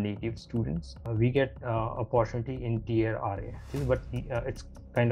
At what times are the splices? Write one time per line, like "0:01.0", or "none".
0:01.0
0:03.7